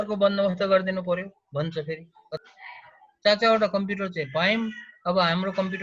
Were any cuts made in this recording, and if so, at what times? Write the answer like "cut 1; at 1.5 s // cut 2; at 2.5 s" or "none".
cut 1; at 2.2 s